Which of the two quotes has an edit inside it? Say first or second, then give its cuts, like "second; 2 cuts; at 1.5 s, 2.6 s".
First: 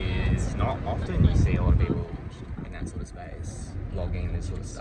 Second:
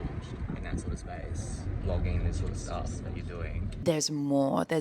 second; 1 cut; at 3.7 s